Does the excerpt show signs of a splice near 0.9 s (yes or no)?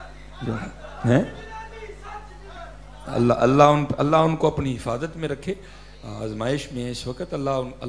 no